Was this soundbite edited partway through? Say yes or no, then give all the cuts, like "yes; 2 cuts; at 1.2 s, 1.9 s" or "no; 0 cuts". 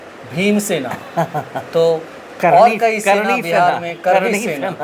no; 0 cuts